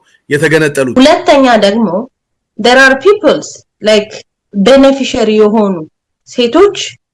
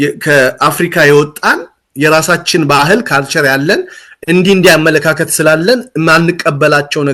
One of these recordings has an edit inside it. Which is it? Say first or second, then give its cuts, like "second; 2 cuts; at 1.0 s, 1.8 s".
first; 1 cut; at 0.9 s